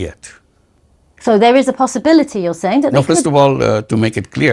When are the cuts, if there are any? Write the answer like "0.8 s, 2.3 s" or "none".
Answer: none